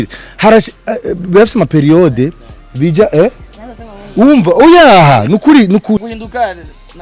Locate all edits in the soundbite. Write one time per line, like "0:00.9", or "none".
0:06.1